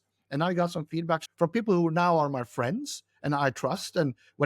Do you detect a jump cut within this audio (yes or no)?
yes